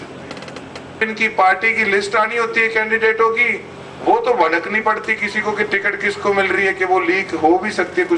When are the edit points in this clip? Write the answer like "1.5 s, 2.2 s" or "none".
1.0 s